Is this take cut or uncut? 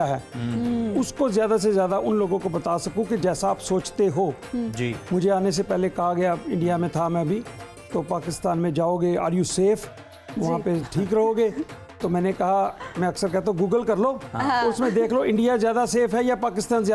uncut